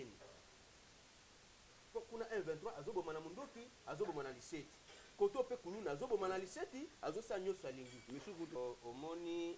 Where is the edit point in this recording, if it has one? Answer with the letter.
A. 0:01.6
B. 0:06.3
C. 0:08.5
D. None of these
C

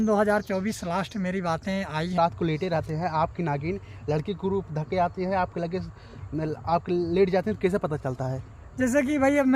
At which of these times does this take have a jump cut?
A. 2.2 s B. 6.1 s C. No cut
A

